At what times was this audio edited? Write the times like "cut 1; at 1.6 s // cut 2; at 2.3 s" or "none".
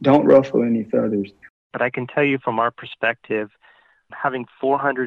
cut 1; at 1.7 s